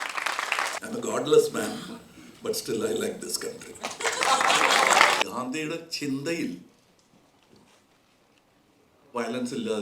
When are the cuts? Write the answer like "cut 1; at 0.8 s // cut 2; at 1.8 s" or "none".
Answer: cut 1; at 0.8 s // cut 2; at 5.2 s